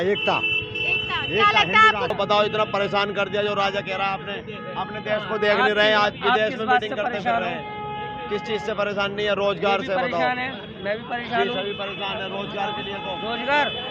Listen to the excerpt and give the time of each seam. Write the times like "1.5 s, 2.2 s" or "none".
2.1 s